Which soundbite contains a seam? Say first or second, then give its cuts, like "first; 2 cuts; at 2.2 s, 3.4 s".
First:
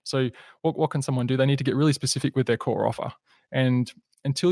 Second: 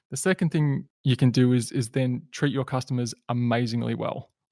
second; 1 cut; at 0.9 s